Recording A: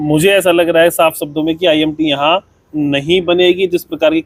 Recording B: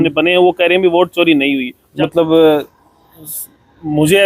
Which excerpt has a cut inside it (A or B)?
B